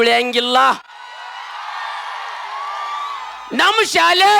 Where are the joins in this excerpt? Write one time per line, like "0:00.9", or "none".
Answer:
0:03.4